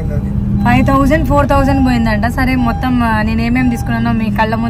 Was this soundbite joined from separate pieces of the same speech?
no; 0 cuts

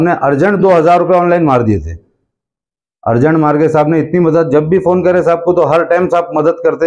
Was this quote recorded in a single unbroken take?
yes; 0 cuts

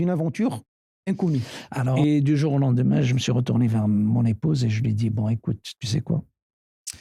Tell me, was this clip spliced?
yes; 1 cut; at 2.0 s

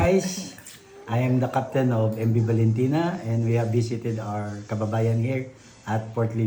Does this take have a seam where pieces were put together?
no; 0 cuts

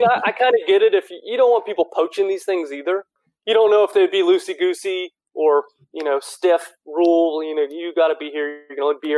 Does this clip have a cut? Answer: yes; 1 cut; at 3.2 s

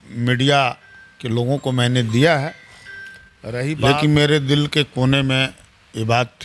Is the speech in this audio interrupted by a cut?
yes; 1 cut; at 3.6 s

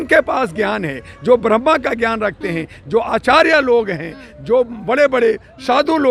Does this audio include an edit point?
no; 0 cuts

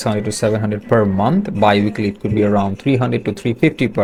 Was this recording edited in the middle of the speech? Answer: no; 0 cuts

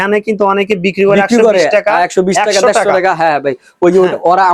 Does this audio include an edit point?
no; 0 cuts

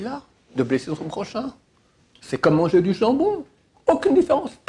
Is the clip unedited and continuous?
yes; 0 cuts

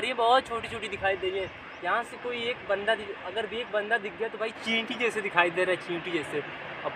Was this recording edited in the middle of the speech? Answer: no; 0 cuts

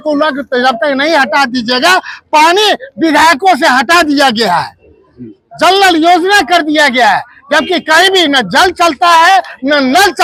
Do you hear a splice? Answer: no; 0 cuts

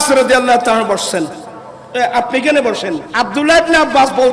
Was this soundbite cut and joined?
yes; 1 cut; at 3.1 s

